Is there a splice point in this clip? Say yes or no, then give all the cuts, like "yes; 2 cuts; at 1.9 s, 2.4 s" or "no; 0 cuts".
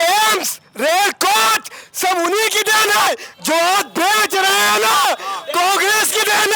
no; 0 cuts